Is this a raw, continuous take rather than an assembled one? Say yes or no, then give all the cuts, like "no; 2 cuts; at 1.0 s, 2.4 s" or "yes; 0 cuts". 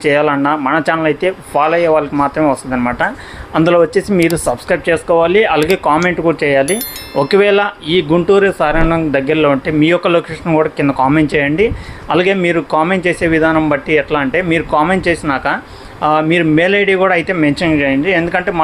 yes; 0 cuts